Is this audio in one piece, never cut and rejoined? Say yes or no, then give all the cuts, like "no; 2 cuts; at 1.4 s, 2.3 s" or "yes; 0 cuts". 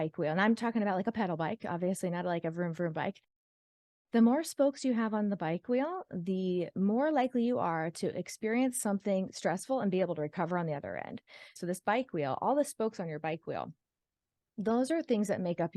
no; 1 cut; at 11.5 s